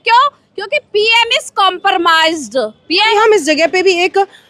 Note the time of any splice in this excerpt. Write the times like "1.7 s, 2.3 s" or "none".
3.1 s